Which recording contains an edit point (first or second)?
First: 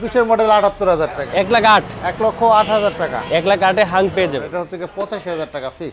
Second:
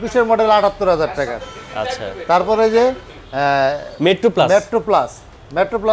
first